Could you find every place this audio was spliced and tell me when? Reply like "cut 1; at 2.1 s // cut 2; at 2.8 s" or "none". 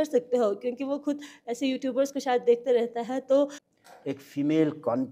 cut 1; at 3.6 s